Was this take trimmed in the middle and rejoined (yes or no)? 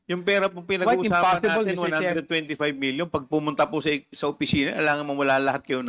no